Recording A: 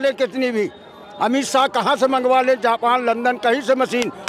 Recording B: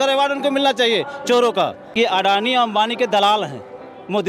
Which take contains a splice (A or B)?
B